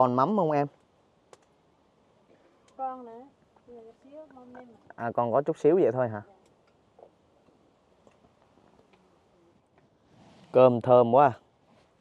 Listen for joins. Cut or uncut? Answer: cut